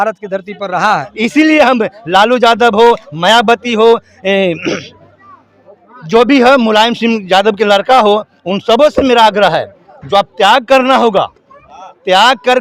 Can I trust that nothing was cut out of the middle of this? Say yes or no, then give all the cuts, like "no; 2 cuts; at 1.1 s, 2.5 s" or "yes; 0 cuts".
no; 1 cut; at 1.1 s